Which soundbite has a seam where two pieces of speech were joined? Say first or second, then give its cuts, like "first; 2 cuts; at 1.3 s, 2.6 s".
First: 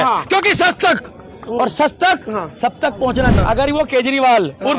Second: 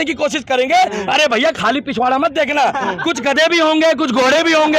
first; 1 cut; at 3.4 s